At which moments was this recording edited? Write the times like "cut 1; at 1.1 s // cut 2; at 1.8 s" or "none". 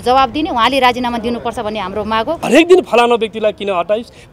cut 1; at 2.4 s

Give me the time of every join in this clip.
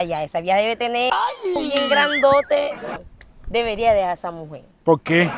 cut 1; at 3.0 s

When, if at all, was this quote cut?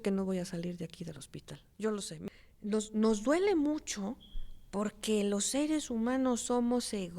cut 1; at 2.2 s

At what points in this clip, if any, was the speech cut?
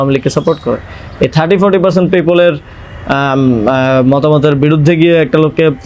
none

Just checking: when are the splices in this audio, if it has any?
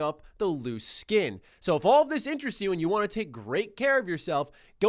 cut 1; at 1.4 s

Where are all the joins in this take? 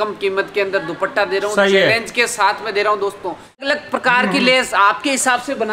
cut 1; at 3.7 s

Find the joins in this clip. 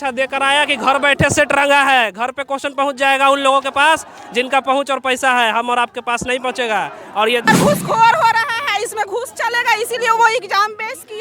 cut 1; at 7.5 s

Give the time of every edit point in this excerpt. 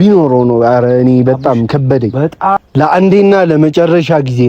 cut 1; at 2.6 s

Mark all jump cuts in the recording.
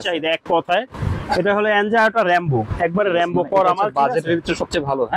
none

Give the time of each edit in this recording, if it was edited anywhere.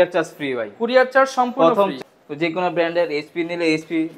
cut 1; at 1.9 s

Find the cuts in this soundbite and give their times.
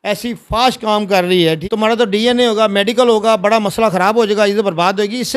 cut 1; at 1.6 s

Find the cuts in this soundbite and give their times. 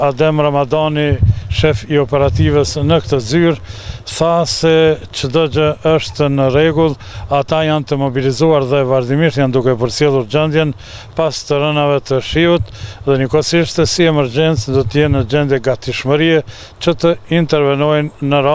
none

